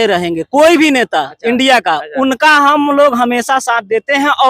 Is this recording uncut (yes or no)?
yes